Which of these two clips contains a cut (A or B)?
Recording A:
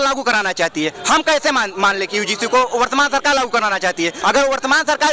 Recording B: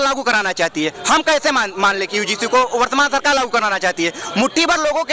A